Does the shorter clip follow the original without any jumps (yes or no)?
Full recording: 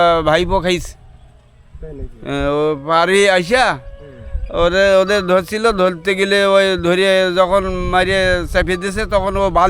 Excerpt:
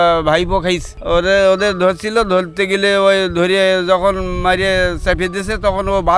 no